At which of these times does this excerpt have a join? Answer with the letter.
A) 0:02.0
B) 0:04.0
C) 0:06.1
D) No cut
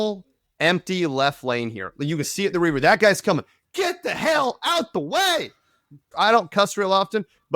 C